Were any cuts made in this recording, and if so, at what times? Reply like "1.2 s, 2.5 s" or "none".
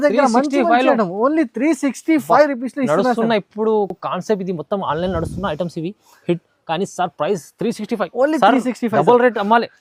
none